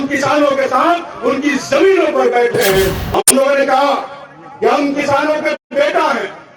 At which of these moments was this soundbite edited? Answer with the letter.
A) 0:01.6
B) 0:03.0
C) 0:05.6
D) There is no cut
B